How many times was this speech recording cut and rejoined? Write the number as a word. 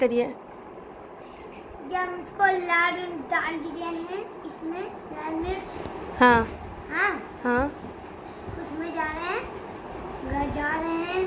zero